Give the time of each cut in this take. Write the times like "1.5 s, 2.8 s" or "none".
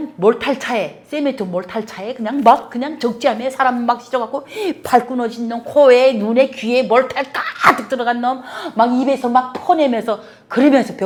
none